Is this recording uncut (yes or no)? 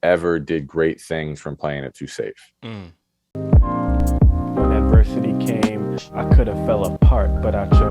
no